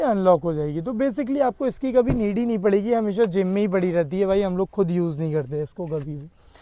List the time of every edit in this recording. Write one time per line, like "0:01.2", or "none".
none

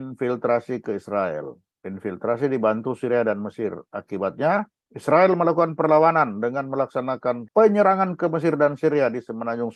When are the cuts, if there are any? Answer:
none

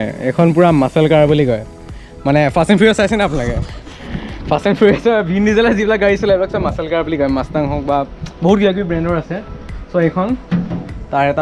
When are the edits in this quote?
none

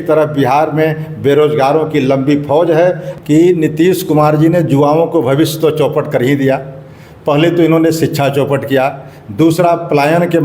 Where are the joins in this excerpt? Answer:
0:03.1

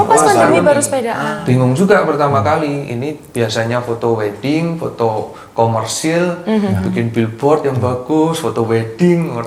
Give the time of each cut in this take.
0:01.3

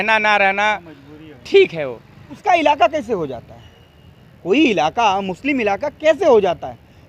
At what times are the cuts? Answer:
0:02.4

